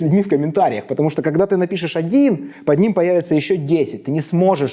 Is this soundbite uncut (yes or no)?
yes